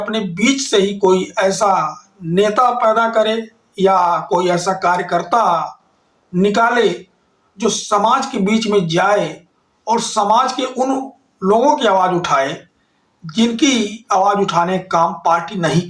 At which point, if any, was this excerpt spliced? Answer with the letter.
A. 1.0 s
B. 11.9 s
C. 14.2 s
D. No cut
D